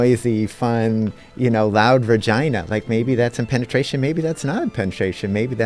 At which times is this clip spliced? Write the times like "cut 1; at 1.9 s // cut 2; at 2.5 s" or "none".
none